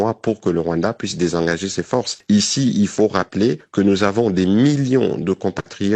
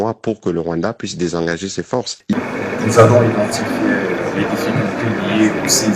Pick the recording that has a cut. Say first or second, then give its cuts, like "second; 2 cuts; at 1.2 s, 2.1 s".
second; 1 cut; at 2.3 s